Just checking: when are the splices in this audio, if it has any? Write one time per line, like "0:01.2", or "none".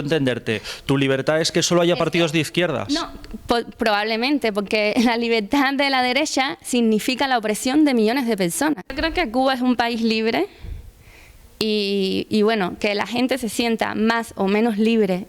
0:08.9